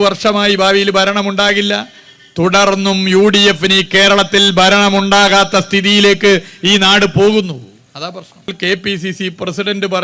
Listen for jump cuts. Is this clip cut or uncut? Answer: cut